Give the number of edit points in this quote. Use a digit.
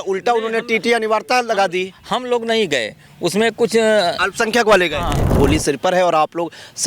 1